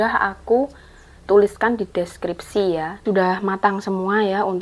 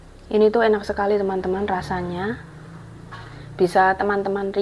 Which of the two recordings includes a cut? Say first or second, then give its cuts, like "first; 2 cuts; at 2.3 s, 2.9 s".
first; 1 cut; at 3.0 s